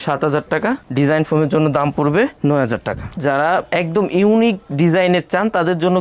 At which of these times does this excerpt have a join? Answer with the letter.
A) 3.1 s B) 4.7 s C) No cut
A